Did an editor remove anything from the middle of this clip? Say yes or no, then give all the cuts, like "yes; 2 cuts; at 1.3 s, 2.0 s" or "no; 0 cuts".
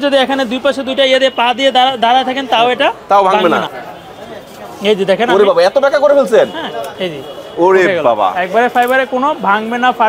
no; 0 cuts